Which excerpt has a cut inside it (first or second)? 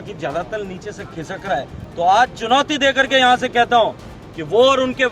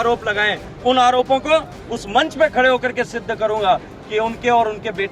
first